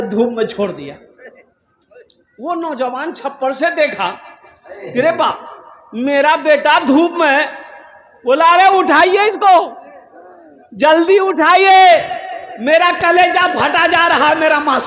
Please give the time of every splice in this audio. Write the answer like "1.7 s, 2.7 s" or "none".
none